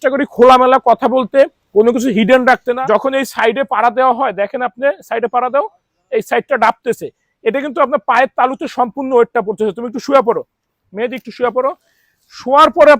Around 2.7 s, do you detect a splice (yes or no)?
yes